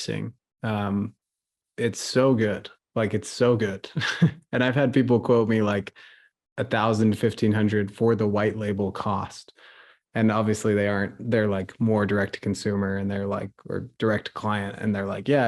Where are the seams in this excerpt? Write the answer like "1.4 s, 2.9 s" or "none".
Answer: none